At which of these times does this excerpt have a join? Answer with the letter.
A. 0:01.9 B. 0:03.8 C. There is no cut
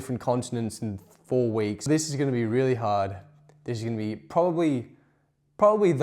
A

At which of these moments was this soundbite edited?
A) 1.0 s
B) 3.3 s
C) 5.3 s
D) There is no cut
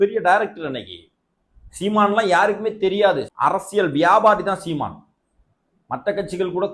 B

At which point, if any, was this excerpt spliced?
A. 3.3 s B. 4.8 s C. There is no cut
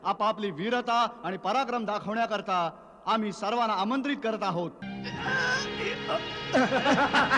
B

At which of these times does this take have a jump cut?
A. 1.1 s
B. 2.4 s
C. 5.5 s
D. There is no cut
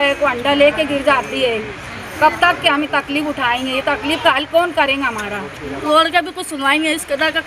C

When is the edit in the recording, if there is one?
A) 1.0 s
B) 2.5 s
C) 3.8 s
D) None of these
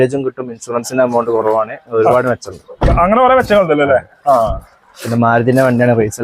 D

